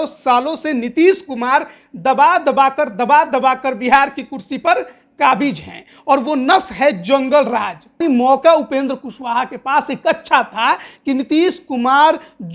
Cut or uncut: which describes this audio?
cut